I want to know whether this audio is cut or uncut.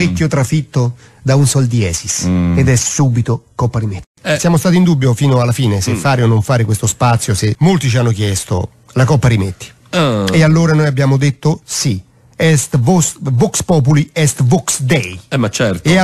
cut